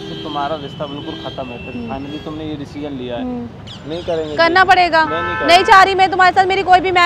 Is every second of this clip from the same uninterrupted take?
no; 1 cut; at 3.5 s

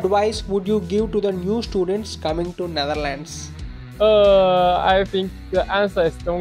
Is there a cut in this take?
no; 0 cuts

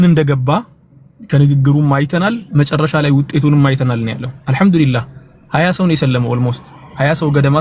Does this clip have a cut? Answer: no; 0 cuts

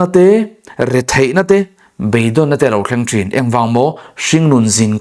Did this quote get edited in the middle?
no; 0 cuts

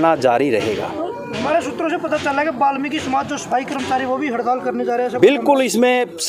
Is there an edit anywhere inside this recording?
no; 0 cuts

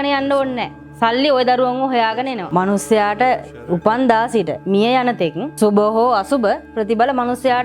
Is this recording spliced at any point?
yes; 1 cut; at 2.5 s

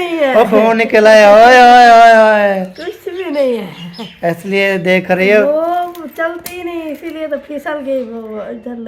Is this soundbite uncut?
yes; 0 cuts

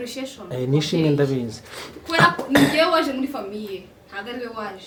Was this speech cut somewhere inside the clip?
no; 0 cuts

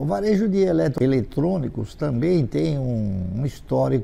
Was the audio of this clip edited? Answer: yes; 1 cut; at 0.9 s

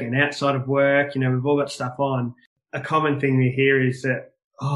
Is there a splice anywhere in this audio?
yes; 1 cut; at 2.5 s

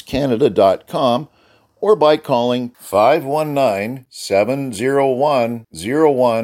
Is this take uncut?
yes; 0 cuts

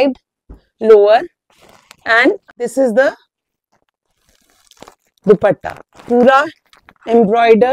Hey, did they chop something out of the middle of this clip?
yes; 1 cut; at 2.4 s

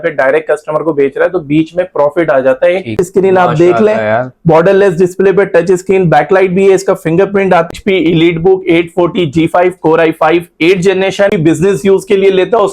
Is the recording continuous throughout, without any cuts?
no; 3 cuts; at 3.0 s, 7.7 s, 11.3 s

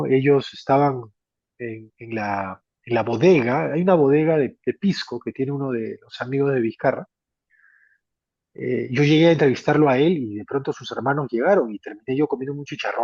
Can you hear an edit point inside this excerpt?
no; 0 cuts

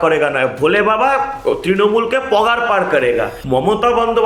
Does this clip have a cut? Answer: yes; 1 cut; at 3.4 s

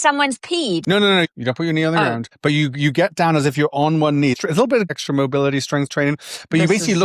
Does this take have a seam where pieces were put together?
yes; 3 cuts; at 1.0 s, 2.3 s, 4.8 s

